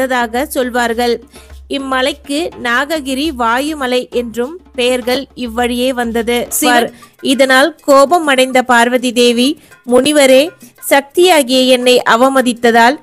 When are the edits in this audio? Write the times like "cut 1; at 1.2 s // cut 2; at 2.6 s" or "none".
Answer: cut 1; at 6.7 s